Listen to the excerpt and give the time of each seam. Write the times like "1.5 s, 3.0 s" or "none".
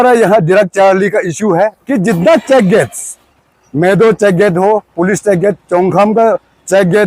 1.8 s